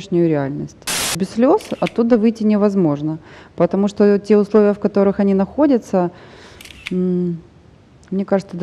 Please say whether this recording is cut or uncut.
cut